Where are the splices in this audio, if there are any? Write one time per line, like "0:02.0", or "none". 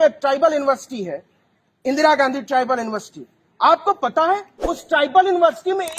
none